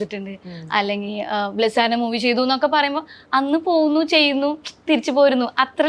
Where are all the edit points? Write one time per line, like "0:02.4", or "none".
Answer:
none